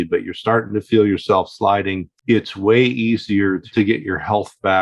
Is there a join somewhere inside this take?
yes; 2 cuts; at 2.1 s, 3.6 s

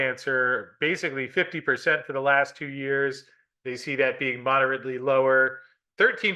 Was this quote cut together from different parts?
no; 0 cuts

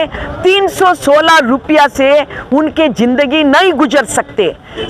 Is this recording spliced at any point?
no; 0 cuts

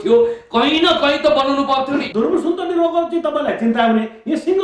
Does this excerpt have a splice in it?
yes; 1 cut; at 2.1 s

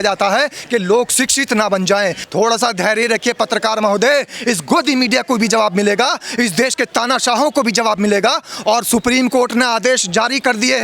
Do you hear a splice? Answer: yes; 1 cut; at 2.2 s

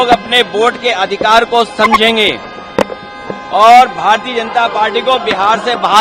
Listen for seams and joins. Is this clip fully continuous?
yes; 0 cuts

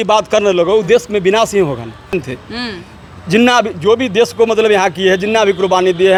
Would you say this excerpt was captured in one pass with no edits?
yes; 0 cuts

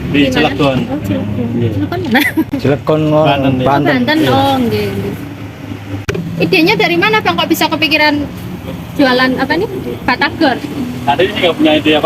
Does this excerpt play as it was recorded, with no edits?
no; 1 cut; at 6.0 s

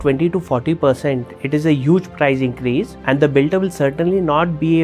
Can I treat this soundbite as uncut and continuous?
no; 1 cut; at 2.9 s

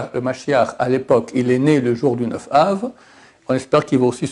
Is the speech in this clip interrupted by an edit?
no; 0 cuts

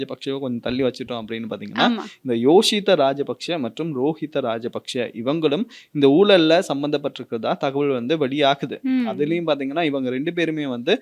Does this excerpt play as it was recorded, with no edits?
yes; 0 cuts

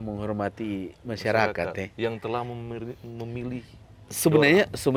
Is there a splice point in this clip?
no; 0 cuts

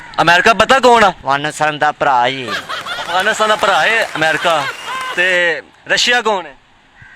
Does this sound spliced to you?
yes; 1 cut; at 1.2 s

